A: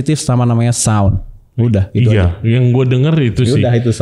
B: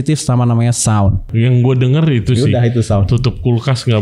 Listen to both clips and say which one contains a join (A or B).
B